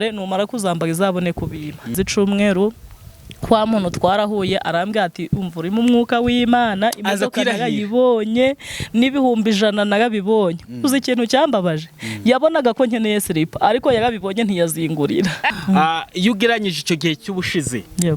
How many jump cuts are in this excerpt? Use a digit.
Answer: 2